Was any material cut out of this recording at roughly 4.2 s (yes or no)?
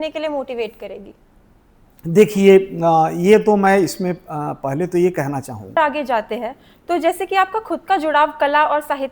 no